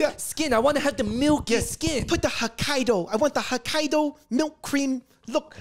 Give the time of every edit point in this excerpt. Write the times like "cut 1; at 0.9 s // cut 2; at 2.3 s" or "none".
none